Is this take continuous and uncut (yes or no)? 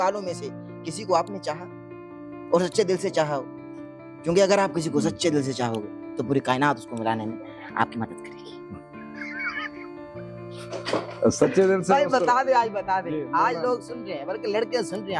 yes